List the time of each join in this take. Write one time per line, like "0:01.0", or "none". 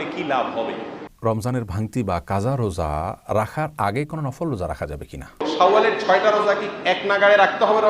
0:01.1
0:05.4